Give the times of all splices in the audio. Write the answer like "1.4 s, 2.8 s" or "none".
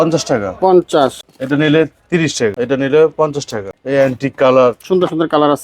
1.3 s, 2.6 s, 3.6 s